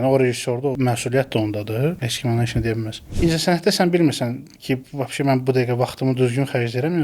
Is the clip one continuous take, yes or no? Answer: no